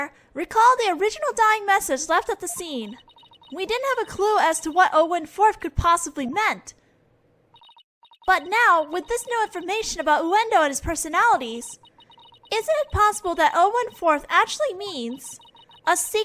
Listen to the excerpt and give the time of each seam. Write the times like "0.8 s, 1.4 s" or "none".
2.2 s